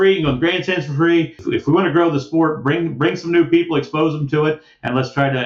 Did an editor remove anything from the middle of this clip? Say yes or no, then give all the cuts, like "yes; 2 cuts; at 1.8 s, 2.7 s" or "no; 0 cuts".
yes; 1 cut; at 1.4 s